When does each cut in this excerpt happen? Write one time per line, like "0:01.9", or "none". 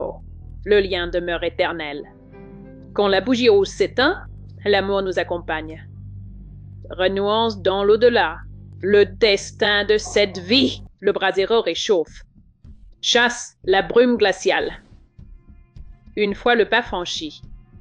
0:10.9